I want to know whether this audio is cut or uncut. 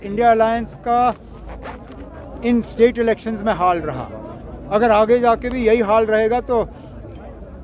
uncut